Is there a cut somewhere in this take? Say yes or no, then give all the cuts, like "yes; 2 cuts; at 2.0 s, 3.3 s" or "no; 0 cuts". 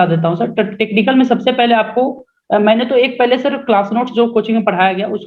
no; 0 cuts